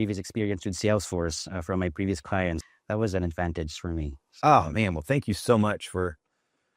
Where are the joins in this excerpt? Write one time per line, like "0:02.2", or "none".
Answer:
0:02.7